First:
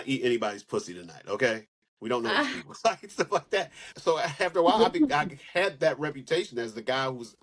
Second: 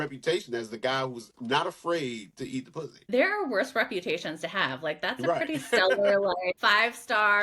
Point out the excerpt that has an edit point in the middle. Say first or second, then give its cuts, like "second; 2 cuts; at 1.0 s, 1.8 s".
second; 1 cut; at 3.0 s